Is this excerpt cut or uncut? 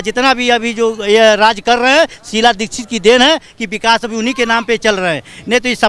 uncut